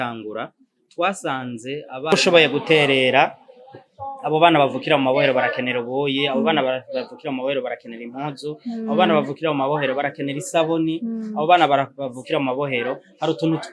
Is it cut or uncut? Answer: cut